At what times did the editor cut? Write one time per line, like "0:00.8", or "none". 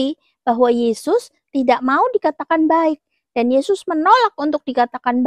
none